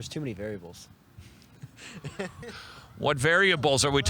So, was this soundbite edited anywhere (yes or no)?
yes